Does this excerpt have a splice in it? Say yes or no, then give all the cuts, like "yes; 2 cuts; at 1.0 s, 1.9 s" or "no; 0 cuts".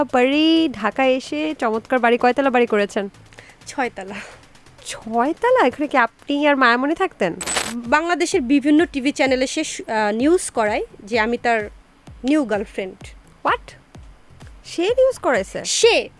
yes; 1 cut; at 7.5 s